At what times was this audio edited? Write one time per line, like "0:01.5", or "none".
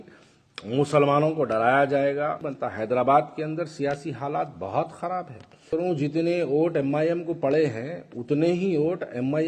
0:02.5
0:05.7